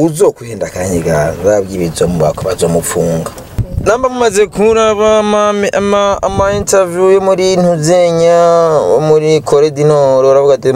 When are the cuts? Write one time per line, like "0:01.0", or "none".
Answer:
0:03.6